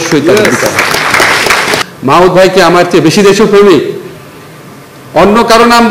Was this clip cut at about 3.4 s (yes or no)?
no